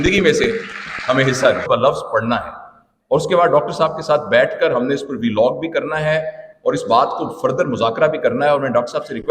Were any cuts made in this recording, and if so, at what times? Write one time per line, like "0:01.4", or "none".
0:01.6